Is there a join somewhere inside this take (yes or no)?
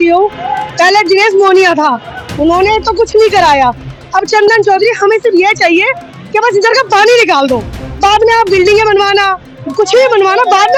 no